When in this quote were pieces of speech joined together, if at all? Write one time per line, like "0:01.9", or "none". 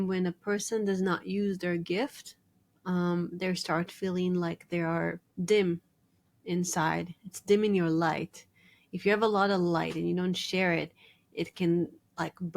0:05.3

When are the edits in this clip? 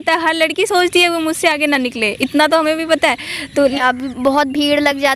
0:03.8

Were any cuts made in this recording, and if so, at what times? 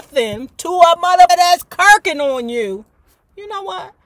0:01.3

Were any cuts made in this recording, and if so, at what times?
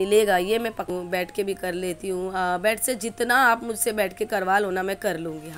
0:00.9

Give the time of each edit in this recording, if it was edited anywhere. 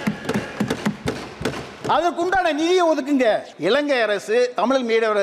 0:03.5

